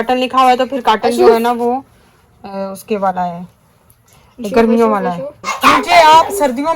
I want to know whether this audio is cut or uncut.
cut